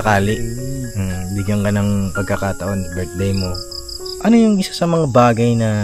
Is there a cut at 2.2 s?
no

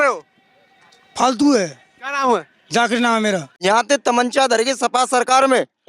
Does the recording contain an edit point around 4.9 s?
no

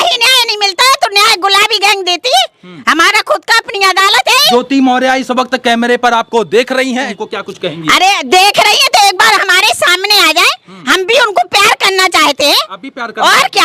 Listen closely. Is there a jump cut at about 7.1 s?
yes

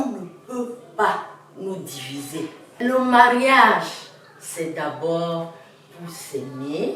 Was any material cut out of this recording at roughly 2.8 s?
yes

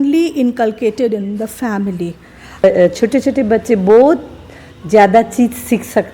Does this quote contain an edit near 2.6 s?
yes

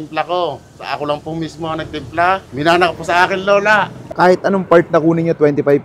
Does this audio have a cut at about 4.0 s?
yes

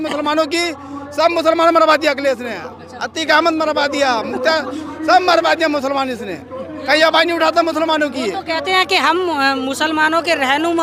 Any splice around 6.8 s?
no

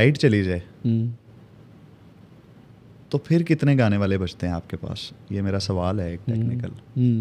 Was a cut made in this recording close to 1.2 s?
no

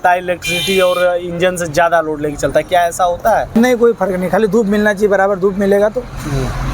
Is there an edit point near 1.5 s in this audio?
no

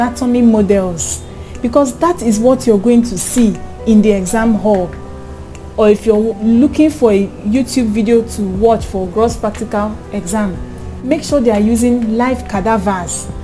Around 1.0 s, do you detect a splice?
no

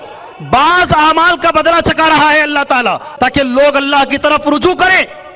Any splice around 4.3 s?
no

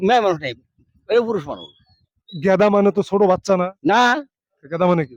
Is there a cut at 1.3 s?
no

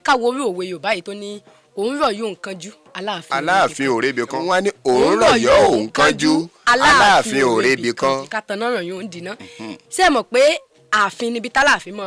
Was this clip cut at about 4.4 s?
yes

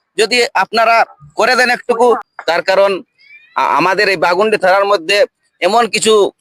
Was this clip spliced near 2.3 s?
yes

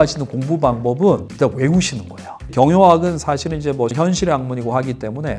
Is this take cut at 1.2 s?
no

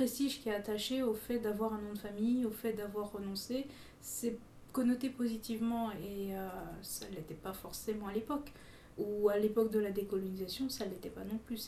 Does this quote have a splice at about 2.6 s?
no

